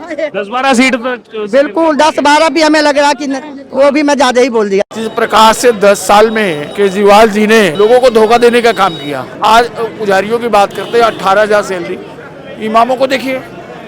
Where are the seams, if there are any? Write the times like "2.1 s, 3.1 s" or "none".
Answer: 4.9 s, 6.6 s, 7.7 s, 9.3 s